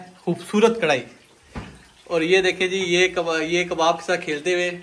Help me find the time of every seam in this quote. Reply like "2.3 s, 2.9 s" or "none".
none